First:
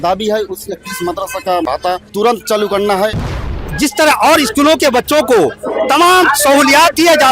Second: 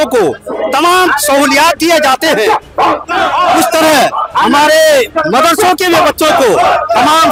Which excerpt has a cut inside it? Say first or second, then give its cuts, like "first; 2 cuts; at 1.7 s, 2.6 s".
first; 2 cuts; at 2.0 s, 3.6 s